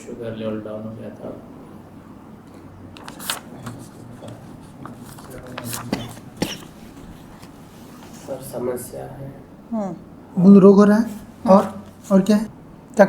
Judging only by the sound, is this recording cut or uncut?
cut